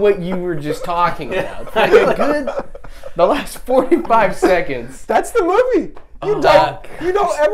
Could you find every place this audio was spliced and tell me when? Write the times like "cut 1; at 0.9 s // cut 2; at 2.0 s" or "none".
none